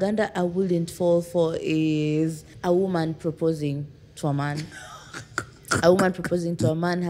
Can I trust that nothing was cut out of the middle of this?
no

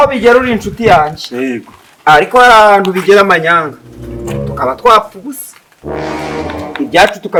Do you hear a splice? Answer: no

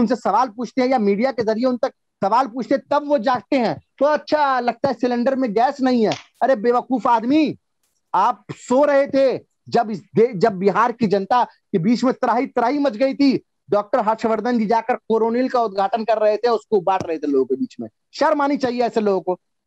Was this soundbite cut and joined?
no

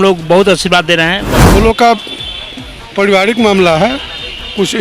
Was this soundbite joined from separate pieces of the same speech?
yes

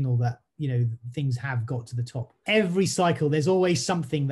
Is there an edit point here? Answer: yes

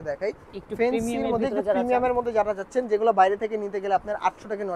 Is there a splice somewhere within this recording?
no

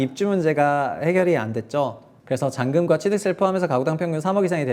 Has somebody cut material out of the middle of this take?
no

